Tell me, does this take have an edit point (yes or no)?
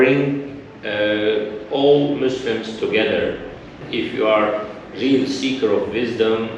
yes